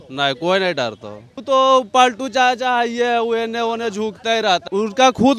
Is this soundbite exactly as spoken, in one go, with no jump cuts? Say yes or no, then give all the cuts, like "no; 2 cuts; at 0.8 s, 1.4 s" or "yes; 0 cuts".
no; 2 cuts; at 1.4 s, 4.6 s